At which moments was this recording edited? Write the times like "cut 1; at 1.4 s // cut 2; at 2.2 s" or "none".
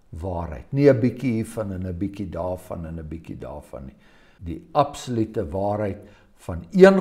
cut 1; at 4.3 s